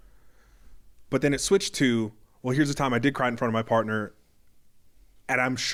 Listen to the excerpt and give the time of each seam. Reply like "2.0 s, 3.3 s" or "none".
none